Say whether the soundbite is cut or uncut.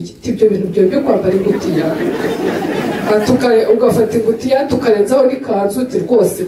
uncut